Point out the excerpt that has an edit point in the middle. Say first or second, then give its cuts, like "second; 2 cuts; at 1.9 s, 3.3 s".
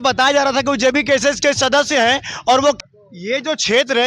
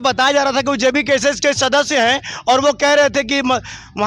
first; 1 cut; at 2.8 s